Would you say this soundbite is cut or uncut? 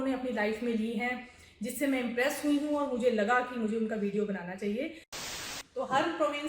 cut